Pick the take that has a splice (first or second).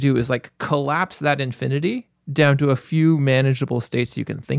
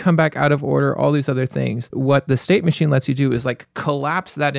second